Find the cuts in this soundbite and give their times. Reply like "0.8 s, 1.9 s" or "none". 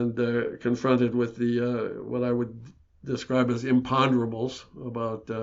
none